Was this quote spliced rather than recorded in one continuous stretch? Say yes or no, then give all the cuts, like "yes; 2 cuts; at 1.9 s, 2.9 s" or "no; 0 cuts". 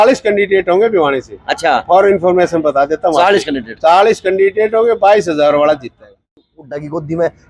yes; 1 cut; at 6.3 s